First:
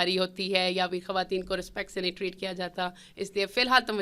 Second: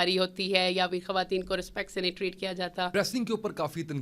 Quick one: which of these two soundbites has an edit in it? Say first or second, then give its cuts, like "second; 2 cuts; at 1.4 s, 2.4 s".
second; 1 cut; at 2.9 s